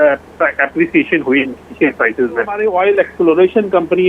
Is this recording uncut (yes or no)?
no